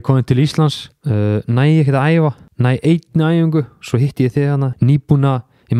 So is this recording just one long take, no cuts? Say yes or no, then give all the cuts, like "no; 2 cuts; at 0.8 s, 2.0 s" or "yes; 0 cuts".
no; 3 cuts; at 0.9 s, 2.5 s, 4.7 s